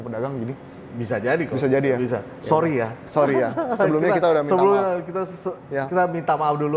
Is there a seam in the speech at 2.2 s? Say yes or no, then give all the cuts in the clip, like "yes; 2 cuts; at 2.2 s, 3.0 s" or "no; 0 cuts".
no; 0 cuts